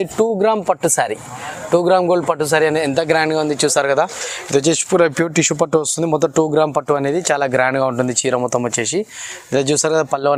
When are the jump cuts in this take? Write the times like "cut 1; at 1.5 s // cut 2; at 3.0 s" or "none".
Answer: none

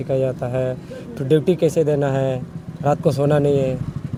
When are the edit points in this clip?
none

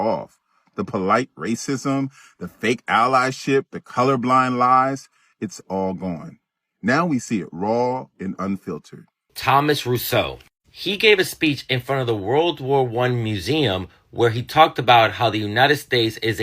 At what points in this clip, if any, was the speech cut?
cut 1; at 9.3 s

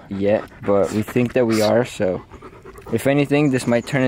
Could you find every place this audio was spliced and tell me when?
none

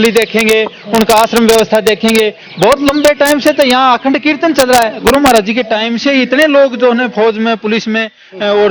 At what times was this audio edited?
cut 1; at 5.0 s

